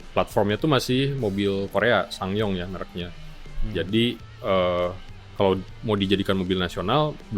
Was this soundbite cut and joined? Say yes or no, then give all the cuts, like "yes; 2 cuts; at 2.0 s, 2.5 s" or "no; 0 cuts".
no; 0 cuts